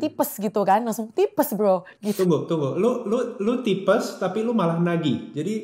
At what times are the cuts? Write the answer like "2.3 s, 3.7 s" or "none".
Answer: 2.2 s